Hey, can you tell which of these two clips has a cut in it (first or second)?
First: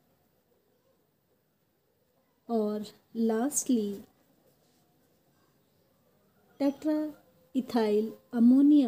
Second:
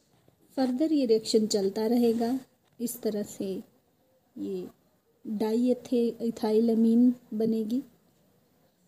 second